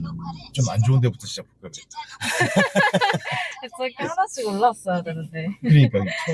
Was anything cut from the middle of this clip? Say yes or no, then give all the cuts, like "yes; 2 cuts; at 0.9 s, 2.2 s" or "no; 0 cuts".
no; 0 cuts